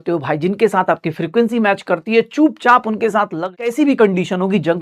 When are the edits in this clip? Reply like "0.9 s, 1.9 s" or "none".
3.6 s